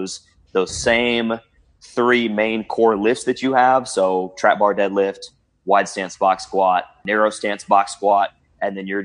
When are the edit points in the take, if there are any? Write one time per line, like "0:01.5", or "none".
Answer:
0:07.0